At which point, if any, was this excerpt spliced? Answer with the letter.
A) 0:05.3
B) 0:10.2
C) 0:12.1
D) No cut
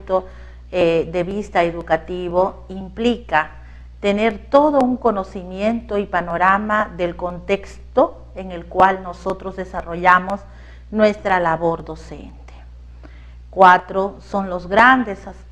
D